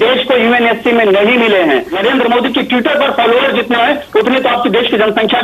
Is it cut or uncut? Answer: cut